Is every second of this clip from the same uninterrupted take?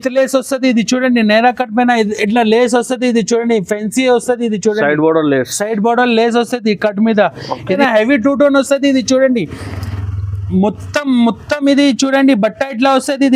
no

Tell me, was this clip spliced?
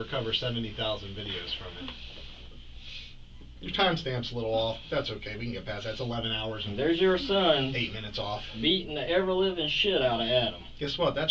no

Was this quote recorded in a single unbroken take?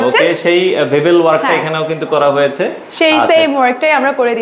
yes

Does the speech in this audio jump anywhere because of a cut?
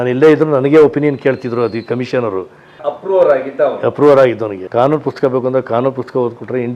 yes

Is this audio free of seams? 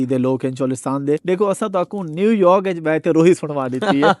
no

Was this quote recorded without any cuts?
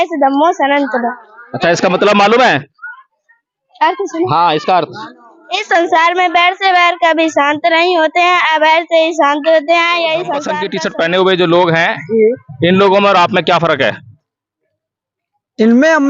no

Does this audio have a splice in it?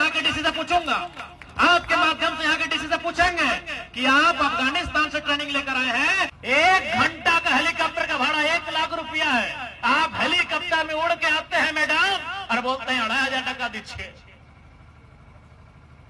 yes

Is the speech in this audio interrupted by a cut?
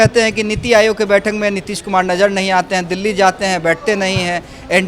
no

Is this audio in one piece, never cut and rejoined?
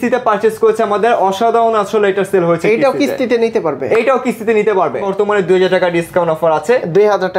no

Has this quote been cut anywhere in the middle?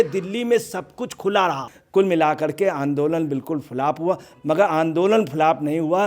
yes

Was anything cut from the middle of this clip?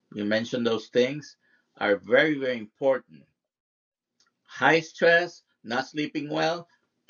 no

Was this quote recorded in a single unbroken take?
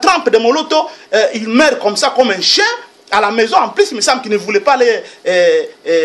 yes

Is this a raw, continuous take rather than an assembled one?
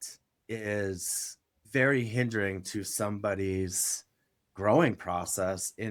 yes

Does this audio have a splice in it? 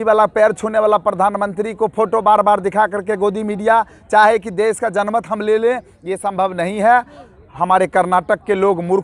no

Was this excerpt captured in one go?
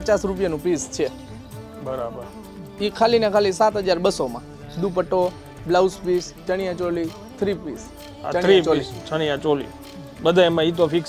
yes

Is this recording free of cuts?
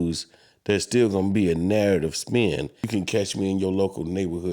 no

